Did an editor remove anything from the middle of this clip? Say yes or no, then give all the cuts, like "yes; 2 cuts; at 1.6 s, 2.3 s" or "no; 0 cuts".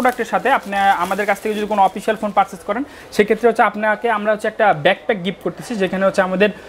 no; 0 cuts